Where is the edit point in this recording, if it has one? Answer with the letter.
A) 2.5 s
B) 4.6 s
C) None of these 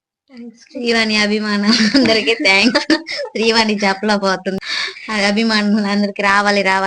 B